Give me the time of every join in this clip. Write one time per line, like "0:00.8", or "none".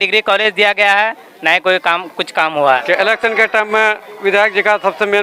0:02.8